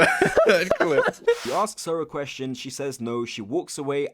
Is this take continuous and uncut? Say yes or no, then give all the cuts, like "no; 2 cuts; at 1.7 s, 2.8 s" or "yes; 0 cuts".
no; 1 cut; at 1.4 s